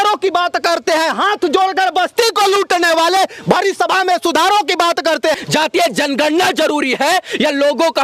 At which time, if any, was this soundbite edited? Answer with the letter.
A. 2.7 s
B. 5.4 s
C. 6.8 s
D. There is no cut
B